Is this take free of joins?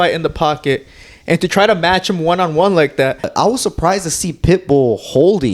no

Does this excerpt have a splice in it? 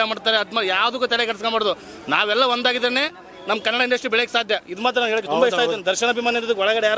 no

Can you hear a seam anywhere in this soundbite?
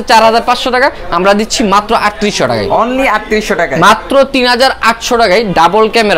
no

